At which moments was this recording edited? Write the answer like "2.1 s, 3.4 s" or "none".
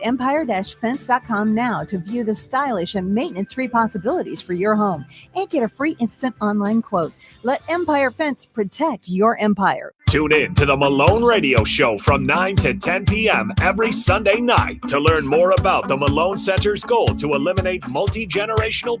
9.6 s